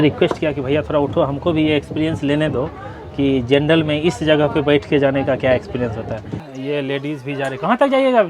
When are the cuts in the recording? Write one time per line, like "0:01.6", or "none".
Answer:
0:06.4